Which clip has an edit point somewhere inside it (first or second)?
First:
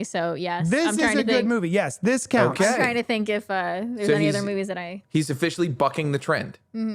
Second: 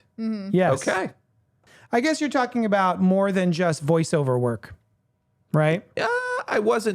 second